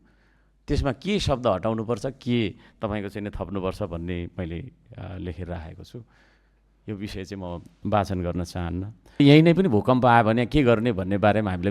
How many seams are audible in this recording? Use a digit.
1